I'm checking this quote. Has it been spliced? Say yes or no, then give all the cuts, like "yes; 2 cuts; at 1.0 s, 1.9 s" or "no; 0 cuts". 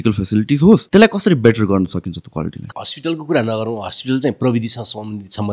yes; 2 cuts; at 0.9 s, 2.6 s